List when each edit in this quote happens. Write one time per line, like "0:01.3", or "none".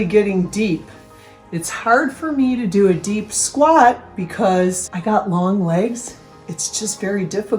0:04.9